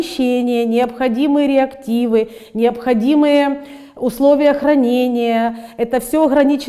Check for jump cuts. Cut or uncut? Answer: uncut